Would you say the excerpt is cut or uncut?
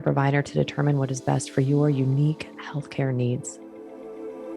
cut